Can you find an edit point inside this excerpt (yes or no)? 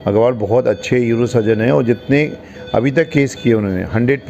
no